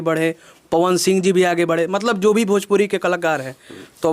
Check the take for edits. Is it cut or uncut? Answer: uncut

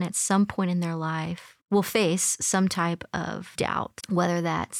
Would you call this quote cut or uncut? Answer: cut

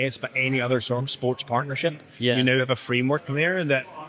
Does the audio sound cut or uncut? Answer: uncut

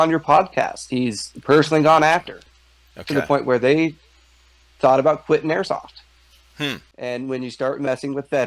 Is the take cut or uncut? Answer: cut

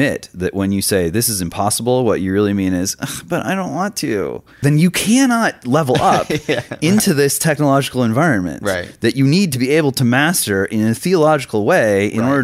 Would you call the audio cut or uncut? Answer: cut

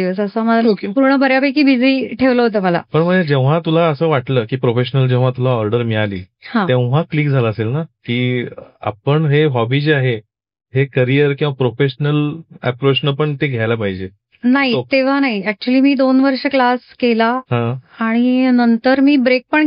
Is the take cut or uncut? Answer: uncut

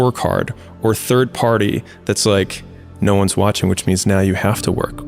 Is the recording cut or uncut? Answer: uncut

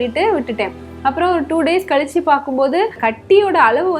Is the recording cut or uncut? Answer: cut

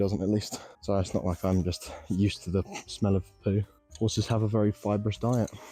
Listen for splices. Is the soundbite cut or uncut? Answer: uncut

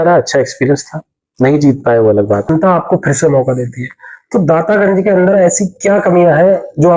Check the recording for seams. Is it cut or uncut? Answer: cut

